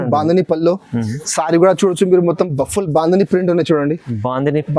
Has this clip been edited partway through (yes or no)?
no